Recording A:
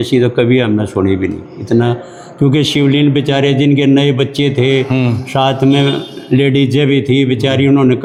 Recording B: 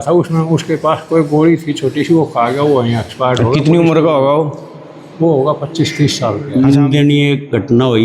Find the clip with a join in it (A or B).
B